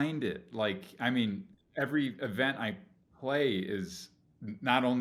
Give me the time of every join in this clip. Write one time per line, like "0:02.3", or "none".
none